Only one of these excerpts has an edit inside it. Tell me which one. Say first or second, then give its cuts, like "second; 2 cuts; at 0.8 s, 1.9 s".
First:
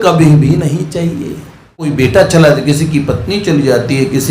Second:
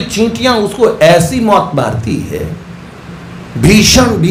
first; 1 cut; at 1.9 s